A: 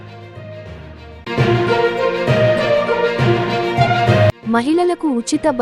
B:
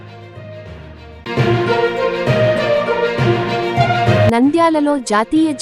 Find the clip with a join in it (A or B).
B